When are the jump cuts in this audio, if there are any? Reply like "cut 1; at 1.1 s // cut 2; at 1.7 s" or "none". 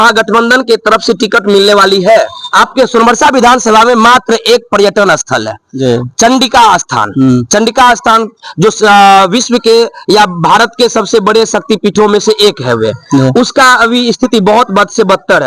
cut 1; at 2.4 s